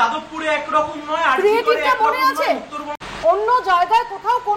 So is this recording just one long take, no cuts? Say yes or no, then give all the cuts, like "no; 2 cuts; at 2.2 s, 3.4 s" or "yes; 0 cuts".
no; 1 cut; at 2.8 s